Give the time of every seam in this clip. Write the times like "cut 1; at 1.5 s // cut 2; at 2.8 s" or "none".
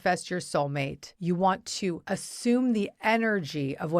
cut 1; at 1.0 s // cut 2; at 2.0 s